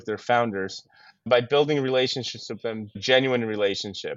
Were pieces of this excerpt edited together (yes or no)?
yes